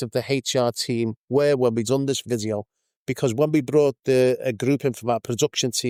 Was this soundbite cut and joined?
no; 0 cuts

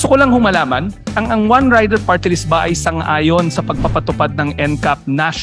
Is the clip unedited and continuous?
no; 1 cut; at 1.2 s

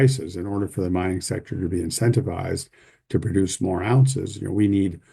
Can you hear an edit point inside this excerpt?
no; 0 cuts

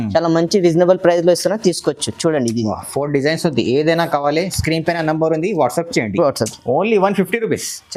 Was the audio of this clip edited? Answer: no; 0 cuts

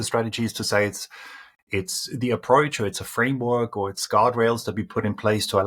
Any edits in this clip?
no; 0 cuts

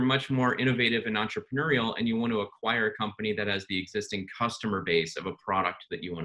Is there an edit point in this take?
no; 0 cuts

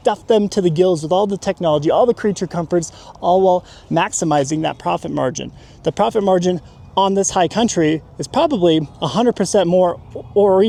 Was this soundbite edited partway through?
no; 0 cuts

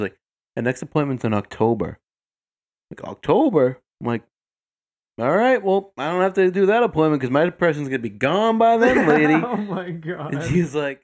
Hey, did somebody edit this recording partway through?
no; 0 cuts

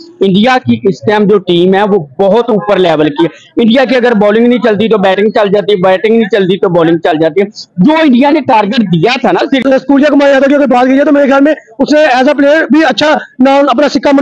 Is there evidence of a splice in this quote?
yes; 1 cut; at 9.6 s

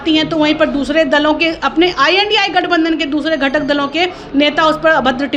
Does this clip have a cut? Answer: no; 0 cuts

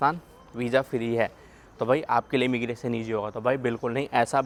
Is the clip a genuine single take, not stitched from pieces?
yes; 0 cuts

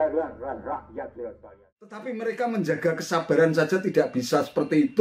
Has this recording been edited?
yes; 1 cut; at 2.0 s

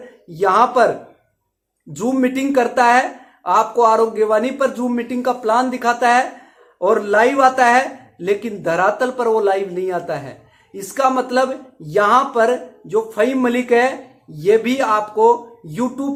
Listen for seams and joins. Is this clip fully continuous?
yes; 0 cuts

